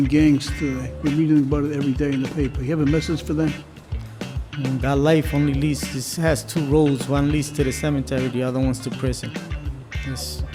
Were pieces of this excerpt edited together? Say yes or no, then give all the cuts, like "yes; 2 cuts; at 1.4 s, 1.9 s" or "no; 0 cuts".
no; 0 cuts